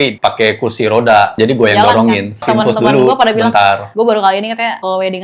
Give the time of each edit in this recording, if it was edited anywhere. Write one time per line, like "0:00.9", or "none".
0:01.3
0:02.4

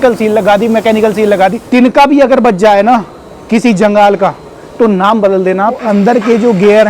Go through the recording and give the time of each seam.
0:01.6
0:05.8

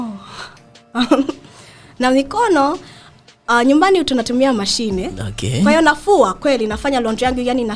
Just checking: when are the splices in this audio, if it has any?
none

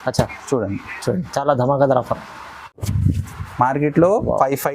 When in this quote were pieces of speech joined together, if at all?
0:02.9

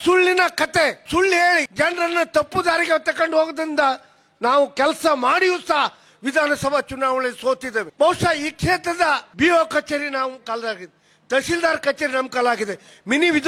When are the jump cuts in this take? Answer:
0:01.0
0:01.7
0:07.8
0:09.3

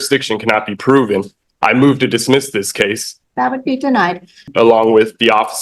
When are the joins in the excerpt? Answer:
0:03.1
0:04.5

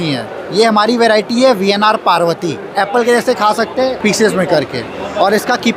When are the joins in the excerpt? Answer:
0:02.7

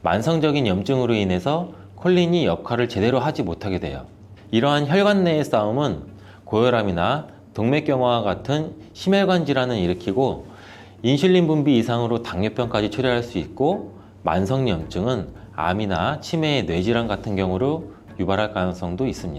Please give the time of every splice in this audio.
none

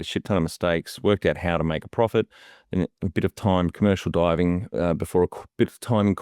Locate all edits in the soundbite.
none

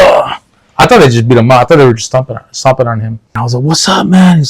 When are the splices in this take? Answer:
0:03.3

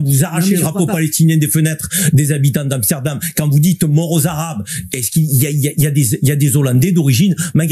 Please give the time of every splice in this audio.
none

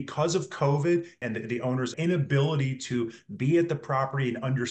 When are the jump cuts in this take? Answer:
0:01.4

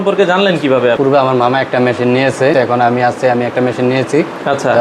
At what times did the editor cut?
0:01.0
0:02.5

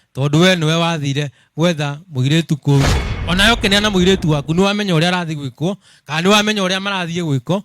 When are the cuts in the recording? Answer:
0:03.2

